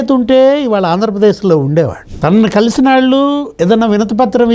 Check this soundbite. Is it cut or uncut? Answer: cut